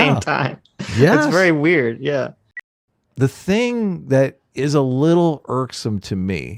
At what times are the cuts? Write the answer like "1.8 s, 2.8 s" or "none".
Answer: 2.5 s